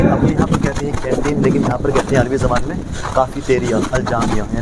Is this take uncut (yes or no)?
yes